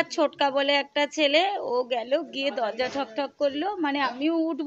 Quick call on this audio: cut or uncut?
uncut